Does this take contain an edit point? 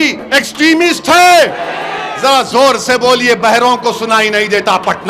no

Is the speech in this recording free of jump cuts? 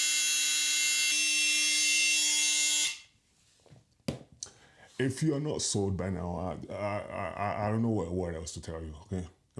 no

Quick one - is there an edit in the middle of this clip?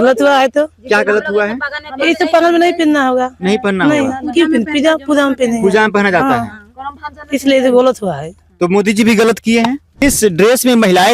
yes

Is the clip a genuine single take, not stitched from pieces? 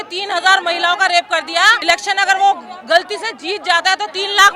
no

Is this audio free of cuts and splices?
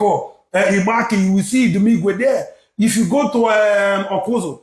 yes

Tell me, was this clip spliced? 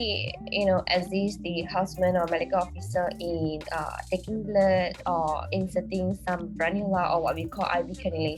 no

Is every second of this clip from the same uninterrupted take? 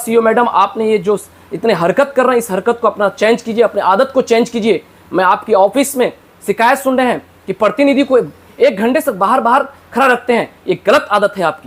yes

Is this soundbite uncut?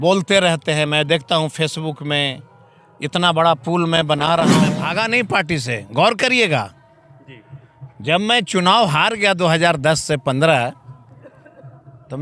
no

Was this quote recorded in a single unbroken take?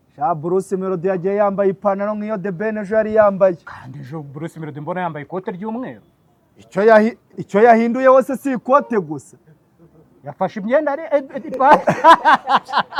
yes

